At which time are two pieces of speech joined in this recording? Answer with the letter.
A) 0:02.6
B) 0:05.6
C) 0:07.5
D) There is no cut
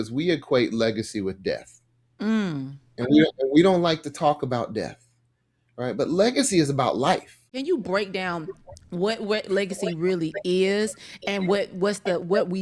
C